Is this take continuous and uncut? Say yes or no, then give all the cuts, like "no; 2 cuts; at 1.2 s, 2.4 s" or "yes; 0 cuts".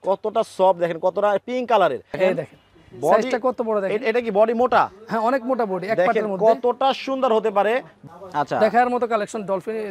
no; 2 cuts; at 2.1 s, 7.9 s